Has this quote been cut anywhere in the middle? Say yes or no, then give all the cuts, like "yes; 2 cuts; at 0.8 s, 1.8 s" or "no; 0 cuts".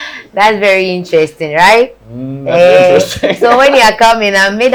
no; 0 cuts